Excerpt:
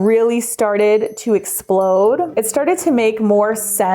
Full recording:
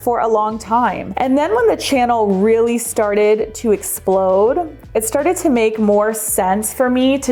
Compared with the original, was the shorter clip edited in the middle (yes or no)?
yes